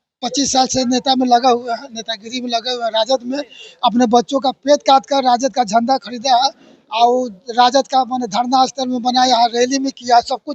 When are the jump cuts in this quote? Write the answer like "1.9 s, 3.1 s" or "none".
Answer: none